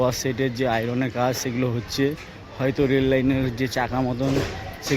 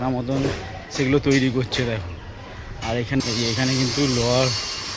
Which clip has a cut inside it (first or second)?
second